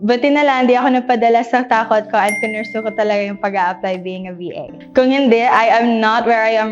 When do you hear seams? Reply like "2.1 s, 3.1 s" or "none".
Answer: none